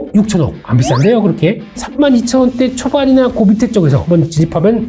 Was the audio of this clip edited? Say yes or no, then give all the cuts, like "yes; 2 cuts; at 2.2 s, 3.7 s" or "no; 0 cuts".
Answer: yes; 1 cut; at 1.7 s